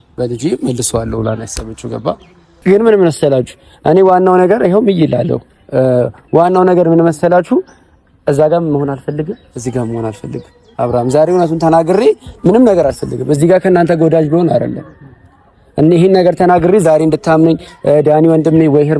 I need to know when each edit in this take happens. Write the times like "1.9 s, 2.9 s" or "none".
2.5 s